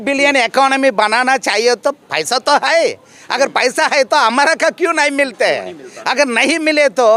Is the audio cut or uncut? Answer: uncut